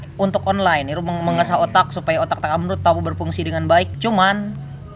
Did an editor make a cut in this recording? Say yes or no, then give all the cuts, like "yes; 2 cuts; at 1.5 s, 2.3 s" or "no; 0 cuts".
yes; 1 cut; at 3.9 s